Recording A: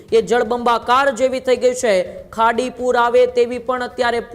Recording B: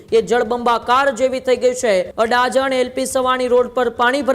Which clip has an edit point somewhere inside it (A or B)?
B